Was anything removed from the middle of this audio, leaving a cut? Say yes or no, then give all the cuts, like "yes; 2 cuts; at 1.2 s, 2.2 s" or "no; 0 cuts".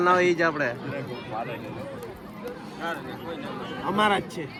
no; 0 cuts